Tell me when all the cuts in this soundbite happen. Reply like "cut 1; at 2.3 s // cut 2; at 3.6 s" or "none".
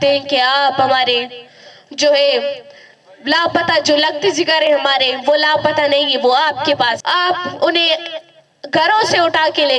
cut 1; at 7.0 s